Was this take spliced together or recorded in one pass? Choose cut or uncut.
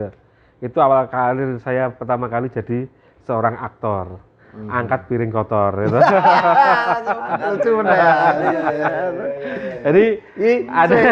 uncut